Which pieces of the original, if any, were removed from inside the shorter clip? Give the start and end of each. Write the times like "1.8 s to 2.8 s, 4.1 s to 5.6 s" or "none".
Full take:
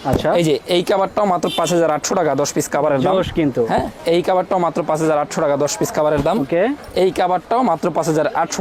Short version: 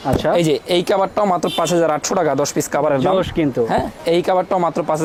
none